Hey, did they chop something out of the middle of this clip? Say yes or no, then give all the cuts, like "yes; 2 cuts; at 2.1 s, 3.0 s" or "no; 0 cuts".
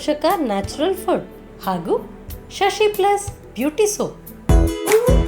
yes; 1 cut; at 4.3 s